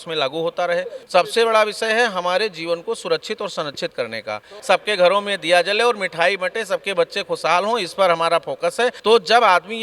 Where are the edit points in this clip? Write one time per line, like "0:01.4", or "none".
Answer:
0:01.0
0:04.6
0:09.0